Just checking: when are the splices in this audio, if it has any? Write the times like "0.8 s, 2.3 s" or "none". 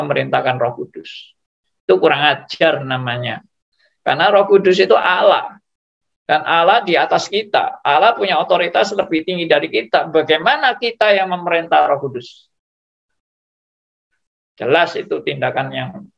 none